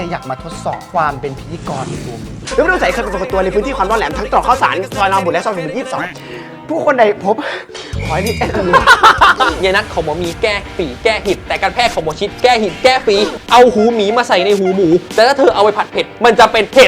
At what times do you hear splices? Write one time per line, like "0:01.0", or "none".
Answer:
0:02.3
0:09.5
0:15.1